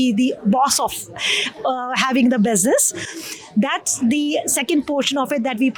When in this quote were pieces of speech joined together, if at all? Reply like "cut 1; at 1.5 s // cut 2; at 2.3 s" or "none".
none